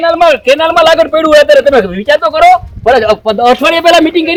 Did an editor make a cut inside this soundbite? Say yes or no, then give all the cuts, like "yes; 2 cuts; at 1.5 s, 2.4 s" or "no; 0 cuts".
no; 0 cuts